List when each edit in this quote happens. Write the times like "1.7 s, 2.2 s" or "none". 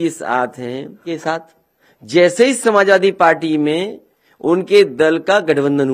1.2 s